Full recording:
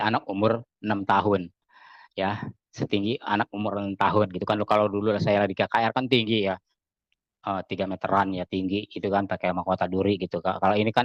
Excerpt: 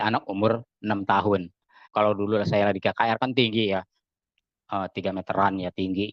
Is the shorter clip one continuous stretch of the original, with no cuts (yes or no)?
no